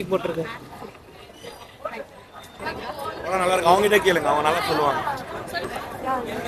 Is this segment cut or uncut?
uncut